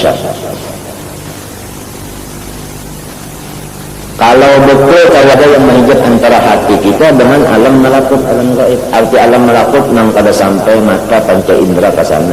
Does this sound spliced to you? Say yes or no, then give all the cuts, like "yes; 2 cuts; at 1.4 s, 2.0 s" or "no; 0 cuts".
yes; 1 cut; at 5.3 s